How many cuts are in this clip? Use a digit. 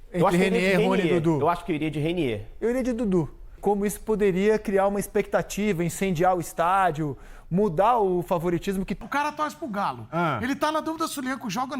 2